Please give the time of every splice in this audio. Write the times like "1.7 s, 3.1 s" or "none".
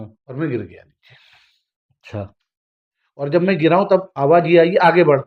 none